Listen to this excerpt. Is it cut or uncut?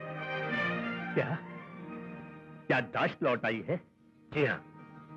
uncut